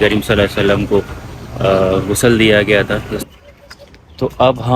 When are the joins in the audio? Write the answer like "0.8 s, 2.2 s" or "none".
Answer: 3.2 s